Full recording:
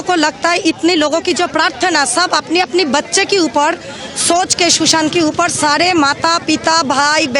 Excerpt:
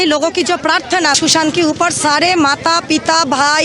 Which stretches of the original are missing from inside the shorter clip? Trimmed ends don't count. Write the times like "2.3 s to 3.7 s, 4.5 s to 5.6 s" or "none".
2.1 s to 4.8 s

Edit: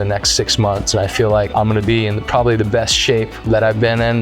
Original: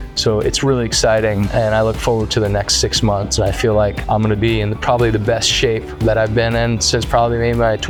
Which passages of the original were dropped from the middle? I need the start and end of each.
3.9 s to 4.0 s

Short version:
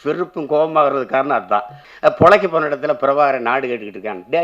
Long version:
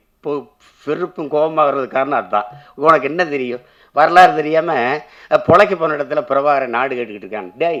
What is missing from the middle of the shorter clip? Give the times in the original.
2.6 s to 5.1 s

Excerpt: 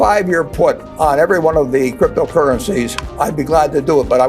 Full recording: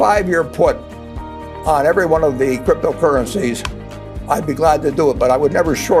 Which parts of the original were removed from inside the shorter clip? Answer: 0.9 s to 1.5 s, 3.7 s to 4.1 s

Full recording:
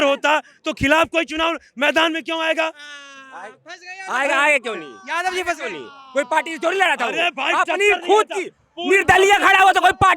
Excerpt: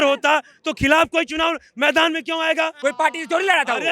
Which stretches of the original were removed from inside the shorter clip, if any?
2.8 s to 6.1 s

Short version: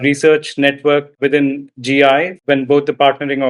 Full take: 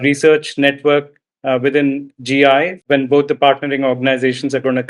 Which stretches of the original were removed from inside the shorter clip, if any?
1.2 s to 1.6 s

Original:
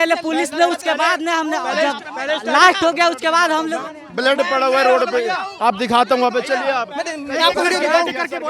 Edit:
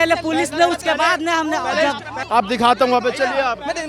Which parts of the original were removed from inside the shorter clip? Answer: 2.2 s to 5.5 s

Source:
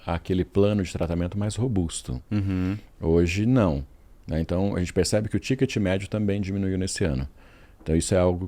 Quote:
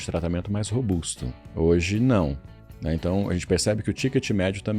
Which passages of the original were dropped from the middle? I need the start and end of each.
2.2 s to 2.8 s

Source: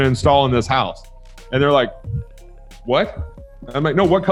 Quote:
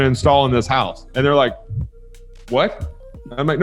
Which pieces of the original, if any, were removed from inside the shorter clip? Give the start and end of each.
1.0 s to 1.4 s

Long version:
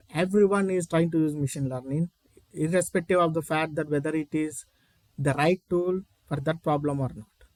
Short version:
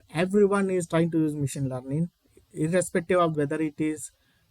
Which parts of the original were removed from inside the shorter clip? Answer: 3.3 s to 3.9 s

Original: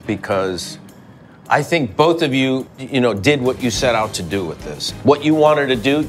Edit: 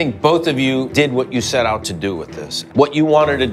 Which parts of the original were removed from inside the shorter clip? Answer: 2.7 s to 3.2 s

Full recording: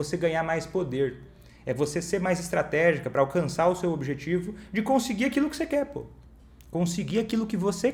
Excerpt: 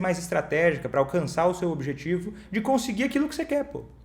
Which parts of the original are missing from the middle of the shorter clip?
none

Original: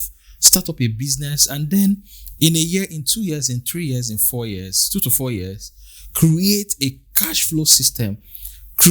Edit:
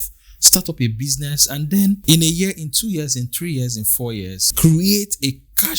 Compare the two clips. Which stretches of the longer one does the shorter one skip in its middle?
2.0 s to 2.3 s, 4.7 s to 6.0 s

